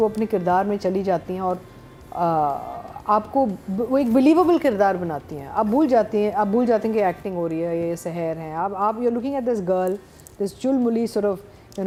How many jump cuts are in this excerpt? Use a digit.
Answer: 0